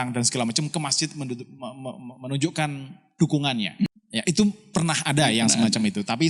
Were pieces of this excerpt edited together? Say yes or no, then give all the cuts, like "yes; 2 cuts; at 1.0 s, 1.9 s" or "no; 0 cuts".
yes; 1 cut; at 3.9 s